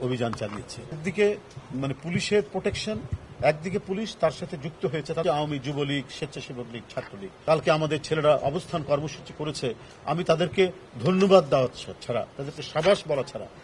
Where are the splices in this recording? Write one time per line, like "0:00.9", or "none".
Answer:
0:01.0
0:05.2
0:07.3